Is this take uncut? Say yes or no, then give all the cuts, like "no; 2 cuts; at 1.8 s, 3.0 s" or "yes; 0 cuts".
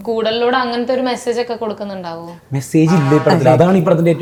yes; 0 cuts